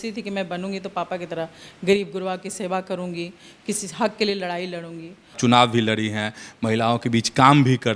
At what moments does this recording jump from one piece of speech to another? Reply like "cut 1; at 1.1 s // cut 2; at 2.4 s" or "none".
cut 1; at 5.4 s